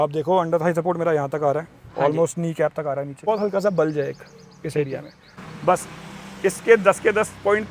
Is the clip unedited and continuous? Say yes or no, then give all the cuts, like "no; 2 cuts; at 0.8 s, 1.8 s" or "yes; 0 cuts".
no; 2 cuts; at 3.2 s, 5.4 s